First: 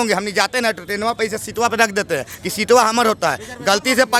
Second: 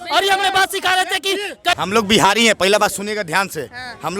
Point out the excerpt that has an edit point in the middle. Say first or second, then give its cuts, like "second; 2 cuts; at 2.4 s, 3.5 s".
second; 1 cut; at 1.8 s